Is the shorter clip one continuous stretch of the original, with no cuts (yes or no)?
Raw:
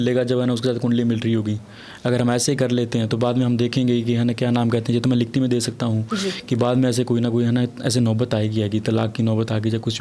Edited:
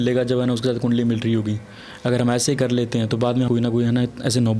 no